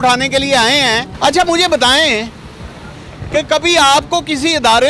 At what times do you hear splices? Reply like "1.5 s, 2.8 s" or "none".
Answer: 1.1 s